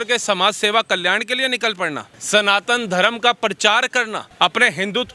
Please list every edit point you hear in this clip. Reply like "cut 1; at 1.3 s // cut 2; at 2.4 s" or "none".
cut 1; at 2.1 s // cut 2; at 4.2 s